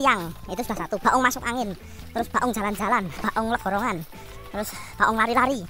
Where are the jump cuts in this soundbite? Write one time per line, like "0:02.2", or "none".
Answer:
0:03.1